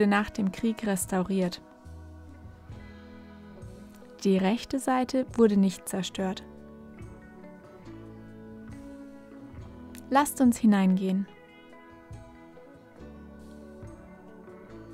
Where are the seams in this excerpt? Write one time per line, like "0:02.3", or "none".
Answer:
none